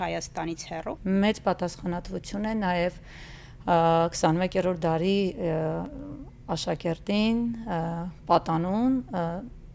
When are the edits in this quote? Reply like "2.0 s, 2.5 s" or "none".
0.9 s